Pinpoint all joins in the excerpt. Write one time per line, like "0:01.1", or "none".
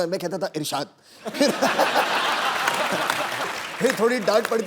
0:03.5